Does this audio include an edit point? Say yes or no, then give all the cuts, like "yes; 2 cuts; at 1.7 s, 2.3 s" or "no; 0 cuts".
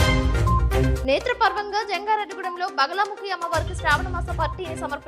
yes; 1 cut; at 0.9 s